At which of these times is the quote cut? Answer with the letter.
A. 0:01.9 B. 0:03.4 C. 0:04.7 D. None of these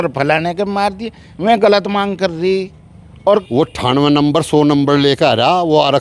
B